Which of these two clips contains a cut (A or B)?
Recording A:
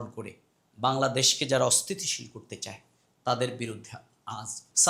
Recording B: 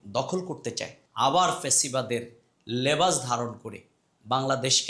B